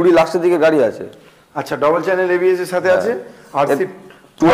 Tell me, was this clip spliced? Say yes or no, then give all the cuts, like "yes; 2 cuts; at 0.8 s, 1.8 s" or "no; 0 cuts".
no; 0 cuts